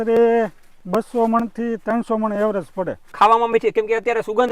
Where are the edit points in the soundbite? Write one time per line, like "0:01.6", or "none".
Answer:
0:03.1

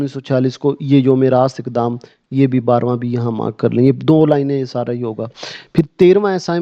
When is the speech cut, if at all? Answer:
none

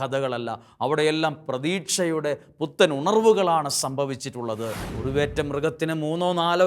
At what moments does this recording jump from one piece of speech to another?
0:04.8

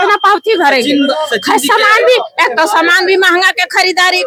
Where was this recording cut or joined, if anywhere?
none

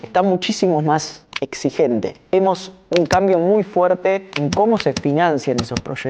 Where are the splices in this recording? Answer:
0:02.3
0:04.3

